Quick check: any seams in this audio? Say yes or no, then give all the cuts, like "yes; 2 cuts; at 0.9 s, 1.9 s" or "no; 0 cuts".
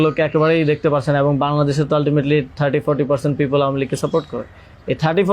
no; 0 cuts